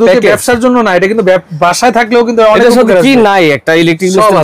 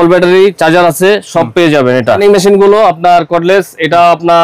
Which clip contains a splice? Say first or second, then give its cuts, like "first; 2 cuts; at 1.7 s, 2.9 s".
second; 1 cut; at 2.2 s